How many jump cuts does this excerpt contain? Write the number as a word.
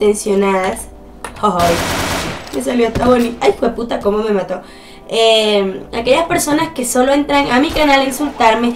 one